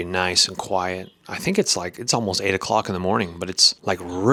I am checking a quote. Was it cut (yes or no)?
no